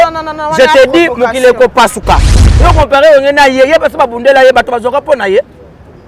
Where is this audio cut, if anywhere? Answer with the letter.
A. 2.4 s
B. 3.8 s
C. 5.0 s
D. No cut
A